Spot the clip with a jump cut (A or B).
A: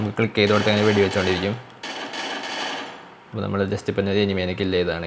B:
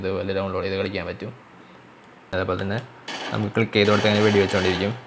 B